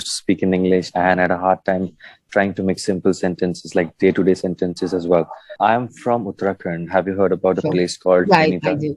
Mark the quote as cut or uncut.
cut